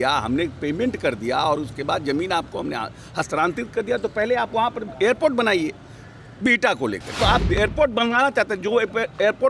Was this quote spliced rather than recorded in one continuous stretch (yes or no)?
yes